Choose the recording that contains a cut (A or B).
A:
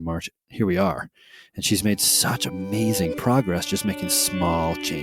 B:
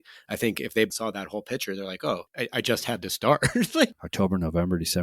B